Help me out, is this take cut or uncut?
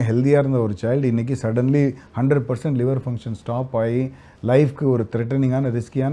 uncut